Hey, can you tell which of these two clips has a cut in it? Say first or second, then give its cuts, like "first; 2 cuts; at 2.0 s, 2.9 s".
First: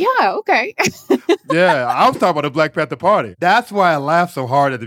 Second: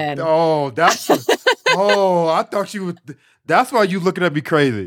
first; 2 cuts; at 1.6 s, 3.4 s